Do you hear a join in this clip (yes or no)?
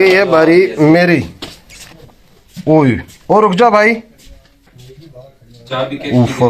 no